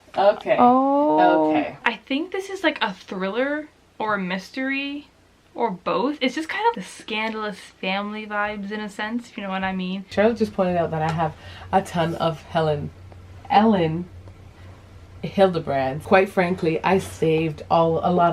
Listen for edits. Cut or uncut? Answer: cut